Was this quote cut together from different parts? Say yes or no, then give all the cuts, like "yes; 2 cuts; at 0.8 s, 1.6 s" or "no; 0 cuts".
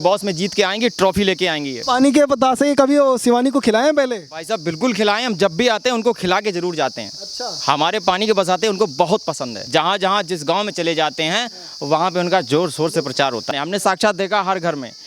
yes; 3 cuts; at 1.8 s, 9.6 s, 13.5 s